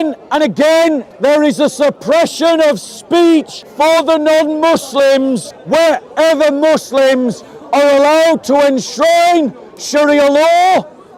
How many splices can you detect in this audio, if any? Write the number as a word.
three